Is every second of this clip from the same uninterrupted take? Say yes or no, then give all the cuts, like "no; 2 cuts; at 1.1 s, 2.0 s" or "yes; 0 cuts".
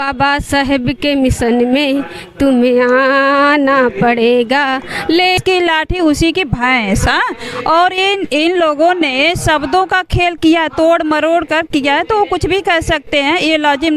no; 1 cut; at 5.4 s